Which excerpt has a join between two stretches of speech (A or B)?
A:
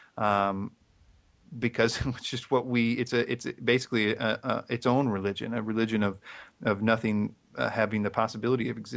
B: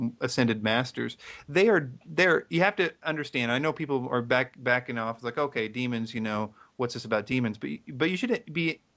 A